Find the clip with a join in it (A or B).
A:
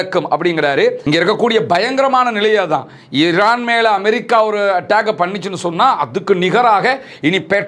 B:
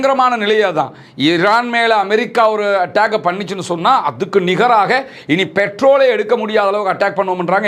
A